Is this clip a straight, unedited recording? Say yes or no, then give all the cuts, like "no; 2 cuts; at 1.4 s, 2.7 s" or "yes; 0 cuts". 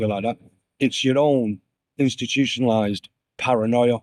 yes; 0 cuts